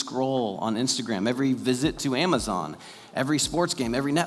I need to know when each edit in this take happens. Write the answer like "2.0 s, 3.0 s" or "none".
none